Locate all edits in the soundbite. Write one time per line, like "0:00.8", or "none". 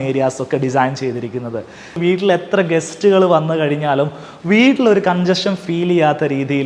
0:02.0